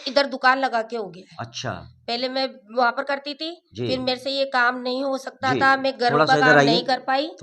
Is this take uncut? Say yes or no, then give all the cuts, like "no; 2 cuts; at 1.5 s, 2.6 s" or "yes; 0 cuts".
yes; 0 cuts